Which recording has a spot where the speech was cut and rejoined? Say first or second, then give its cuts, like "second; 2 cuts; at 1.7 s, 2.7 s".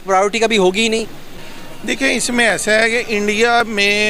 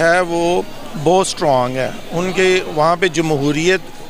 first; 1 cut; at 1.4 s